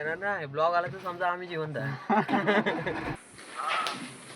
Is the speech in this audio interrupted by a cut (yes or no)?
yes